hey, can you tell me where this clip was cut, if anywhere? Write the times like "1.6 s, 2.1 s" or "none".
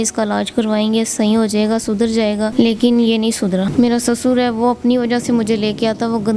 2.5 s, 3.7 s